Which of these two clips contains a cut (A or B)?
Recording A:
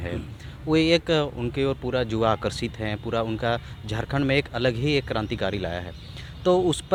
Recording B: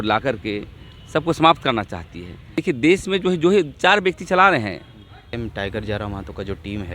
B